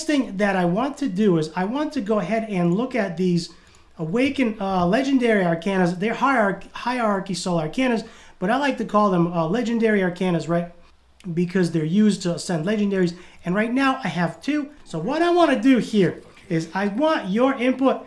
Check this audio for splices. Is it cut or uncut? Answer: cut